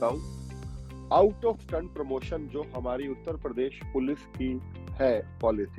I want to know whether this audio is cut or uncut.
uncut